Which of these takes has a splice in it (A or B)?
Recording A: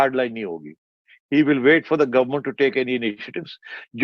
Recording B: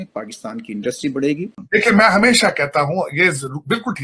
B